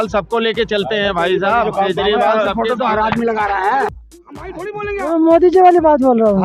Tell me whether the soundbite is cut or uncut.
cut